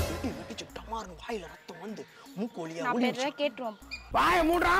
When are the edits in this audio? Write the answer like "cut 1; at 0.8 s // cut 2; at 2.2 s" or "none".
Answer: none